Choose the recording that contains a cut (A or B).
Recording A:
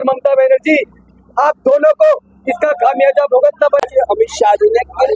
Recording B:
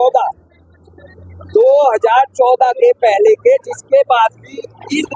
A